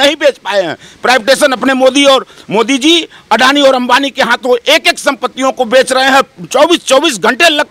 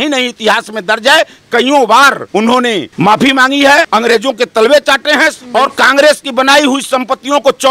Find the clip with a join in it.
second; 3 cuts; at 2.4 s, 3.9 s, 5.4 s

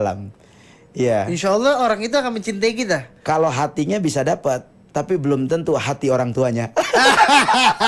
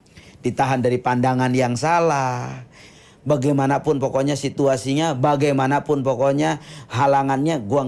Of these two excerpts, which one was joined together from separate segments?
second; 1 cut; at 2.9 s

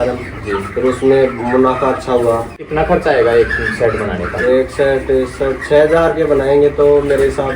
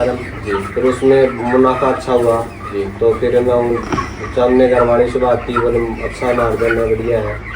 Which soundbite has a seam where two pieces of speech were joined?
first; 1 cut; at 2.6 s

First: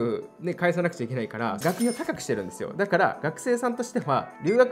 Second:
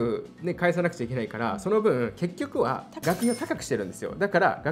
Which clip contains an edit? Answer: first; 1 cut; at 1.6 s

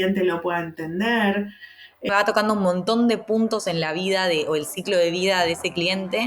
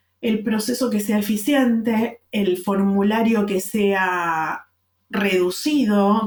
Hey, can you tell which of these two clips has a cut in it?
first; 1 cut; at 2.1 s

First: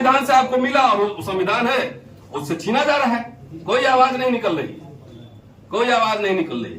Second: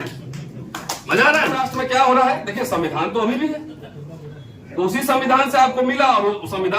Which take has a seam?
second; 1 cut; at 1.7 s

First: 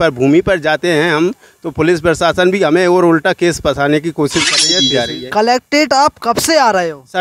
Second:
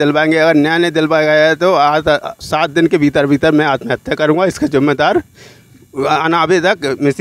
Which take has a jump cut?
first; 1 cut; at 4.8 s

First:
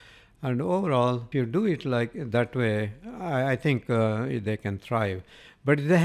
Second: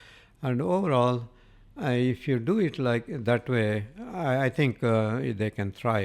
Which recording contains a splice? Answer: first; 1 cut; at 1.3 s

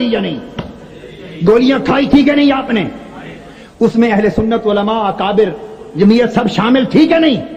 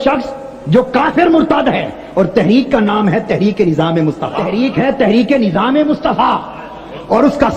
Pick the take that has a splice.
second; 1 cut; at 4.4 s

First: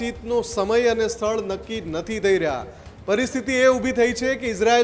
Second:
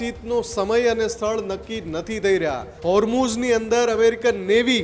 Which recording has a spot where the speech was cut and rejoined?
second; 1 cut; at 2.7 s

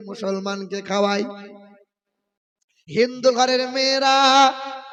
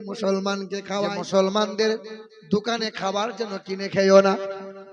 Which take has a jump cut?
second; 1 cut; at 0.9 s

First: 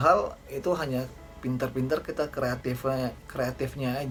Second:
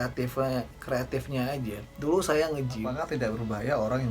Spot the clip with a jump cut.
second; 1 cut; at 2.8 s

